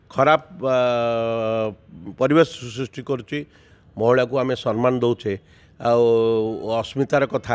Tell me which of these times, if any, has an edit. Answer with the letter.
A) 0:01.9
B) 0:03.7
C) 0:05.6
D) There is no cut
B